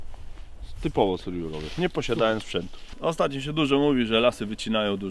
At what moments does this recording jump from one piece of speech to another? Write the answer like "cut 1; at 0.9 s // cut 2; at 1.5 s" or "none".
cut 1; at 2.8 s